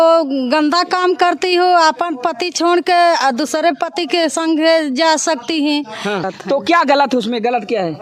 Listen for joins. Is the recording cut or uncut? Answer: cut